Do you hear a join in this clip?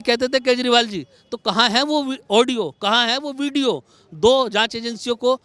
no; 0 cuts

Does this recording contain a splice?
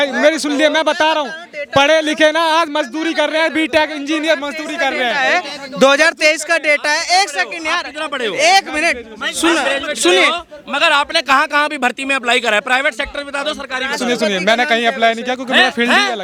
no; 0 cuts

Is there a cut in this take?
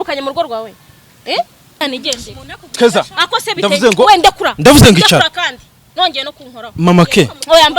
yes; 1 cut; at 1.8 s

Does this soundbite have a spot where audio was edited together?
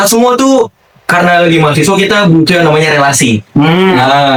no; 0 cuts

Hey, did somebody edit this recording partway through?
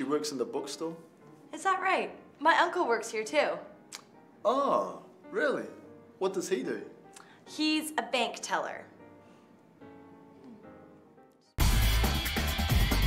yes; 1 cut; at 11.4 s

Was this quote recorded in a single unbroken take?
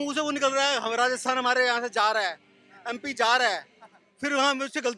yes; 0 cuts

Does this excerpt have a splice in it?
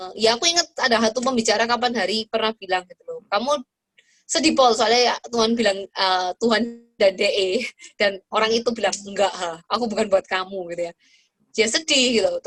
no; 0 cuts

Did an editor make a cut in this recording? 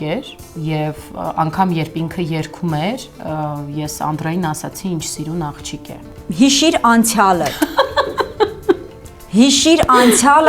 yes; 1 cut; at 6.0 s

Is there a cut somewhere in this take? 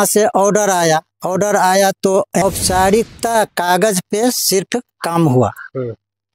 yes; 1 cut; at 2.4 s

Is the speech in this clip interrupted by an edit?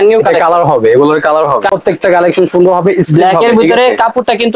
yes; 1 cut; at 1.7 s

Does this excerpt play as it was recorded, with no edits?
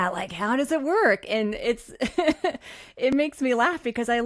yes; 0 cuts

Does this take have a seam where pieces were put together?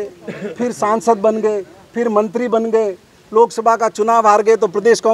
no; 0 cuts

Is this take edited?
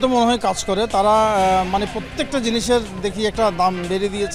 no; 0 cuts

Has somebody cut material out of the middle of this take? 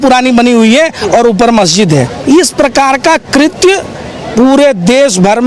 yes; 1 cut; at 2.1 s

